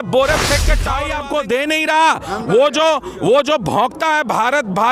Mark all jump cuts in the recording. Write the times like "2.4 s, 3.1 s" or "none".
0.9 s